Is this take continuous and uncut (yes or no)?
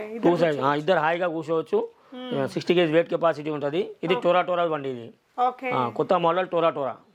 yes